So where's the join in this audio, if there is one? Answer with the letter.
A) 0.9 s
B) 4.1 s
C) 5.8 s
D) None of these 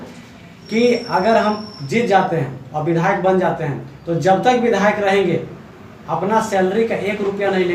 D